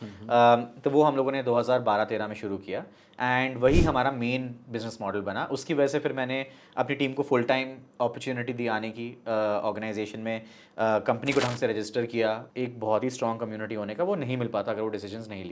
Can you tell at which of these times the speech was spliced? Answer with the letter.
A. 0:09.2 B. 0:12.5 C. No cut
B